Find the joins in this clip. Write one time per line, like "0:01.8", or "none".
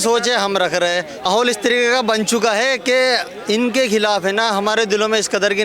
0:01.2